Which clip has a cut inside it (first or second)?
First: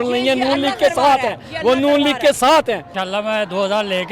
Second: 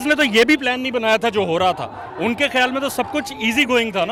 first